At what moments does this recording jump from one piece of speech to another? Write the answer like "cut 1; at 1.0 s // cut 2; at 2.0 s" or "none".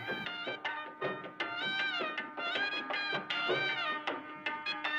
none